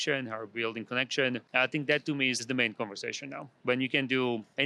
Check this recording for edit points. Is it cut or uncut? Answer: cut